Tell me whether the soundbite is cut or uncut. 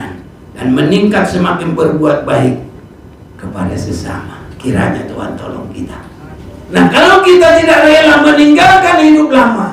cut